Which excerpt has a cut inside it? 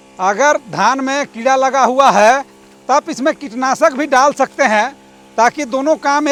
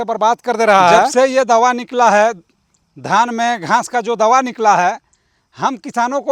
second; 1 cut; at 1.1 s

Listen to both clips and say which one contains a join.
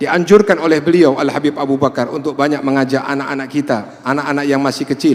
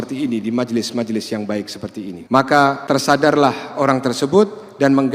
second; 2 cuts; at 2.2 s, 2.8 s

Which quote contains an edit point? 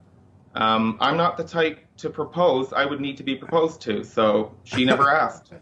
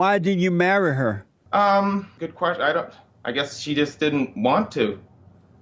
second; 3 cuts; at 1.3 s, 2.1 s, 3.0 s

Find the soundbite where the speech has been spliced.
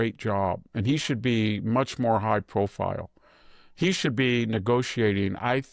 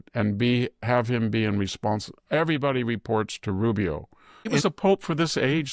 second; 1 cut; at 4.5 s

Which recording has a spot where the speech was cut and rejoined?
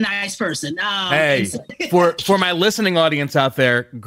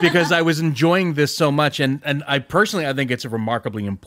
first; 1 cut; at 1.8 s

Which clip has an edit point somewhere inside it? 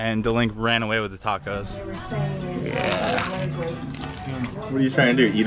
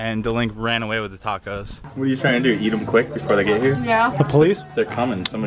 second; 1 cut; at 1.8 s

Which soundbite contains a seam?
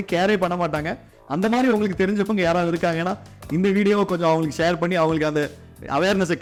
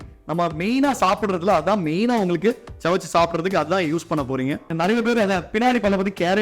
second; 1 cut; at 4.7 s

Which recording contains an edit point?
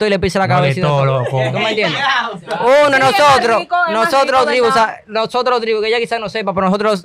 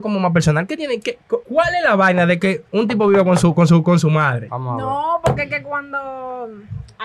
second; 3 cuts; at 1.5 s, 2.6 s, 4.5 s

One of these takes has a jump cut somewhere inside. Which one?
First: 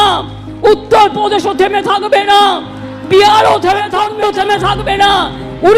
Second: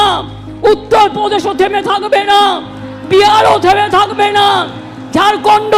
first; 1 cut; at 4.0 s

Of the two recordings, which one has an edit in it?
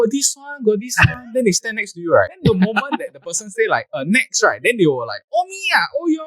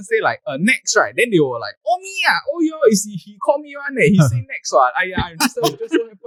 first; 1 cut; at 2.3 s

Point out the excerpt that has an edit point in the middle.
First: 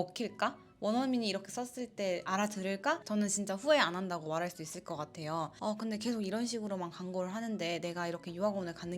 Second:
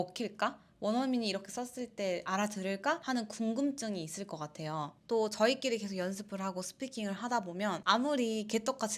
first; 2 cuts; at 3.0 s, 5.6 s

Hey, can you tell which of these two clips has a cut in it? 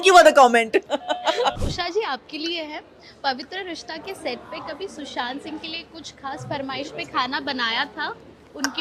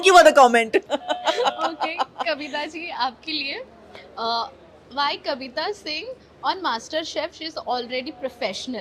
first; 1 cut; at 1.6 s

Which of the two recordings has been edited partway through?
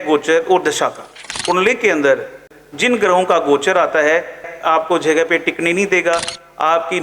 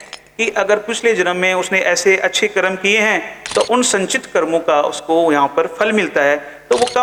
first; 3 cuts; at 1.3 s, 2.4 s, 4.5 s

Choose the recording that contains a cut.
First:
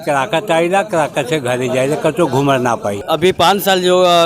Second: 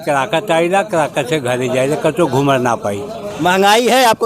first; 1 cut; at 2.9 s

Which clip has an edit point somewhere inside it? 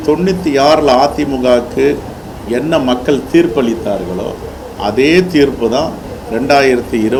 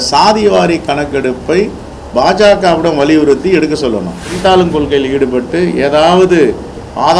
second; 1 cut; at 4.3 s

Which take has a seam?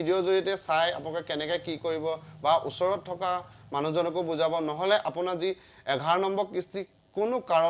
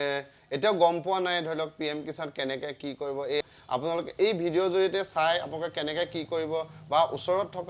second; 1 cut; at 3.4 s

